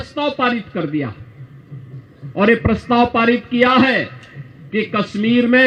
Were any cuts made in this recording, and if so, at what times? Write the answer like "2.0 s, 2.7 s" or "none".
none